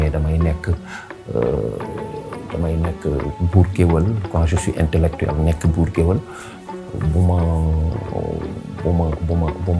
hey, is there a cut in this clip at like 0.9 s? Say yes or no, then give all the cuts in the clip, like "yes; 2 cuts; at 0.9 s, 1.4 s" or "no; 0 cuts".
no; 0 cuts